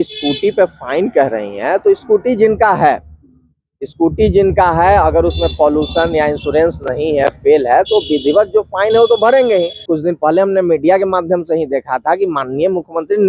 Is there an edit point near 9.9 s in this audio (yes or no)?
yes